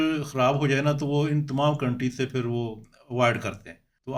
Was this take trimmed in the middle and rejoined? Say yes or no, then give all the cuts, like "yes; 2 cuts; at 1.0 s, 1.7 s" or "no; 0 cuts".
no; 0 cuts